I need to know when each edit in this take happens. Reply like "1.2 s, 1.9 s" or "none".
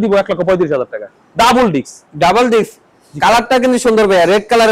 none